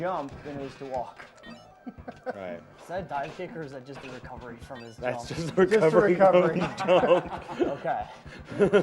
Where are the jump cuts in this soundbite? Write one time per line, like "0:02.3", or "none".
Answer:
0:07.4